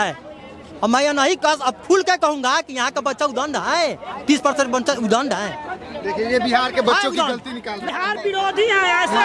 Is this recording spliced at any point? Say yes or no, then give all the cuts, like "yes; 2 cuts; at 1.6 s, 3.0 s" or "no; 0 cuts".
yes; 1 cut; at 7.8 s